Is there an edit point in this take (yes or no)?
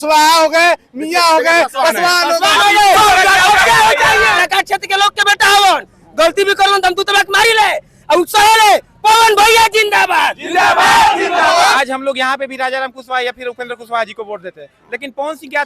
yes